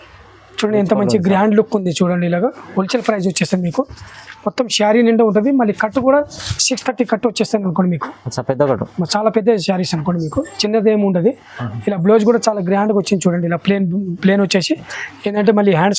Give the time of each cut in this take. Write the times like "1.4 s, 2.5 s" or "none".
none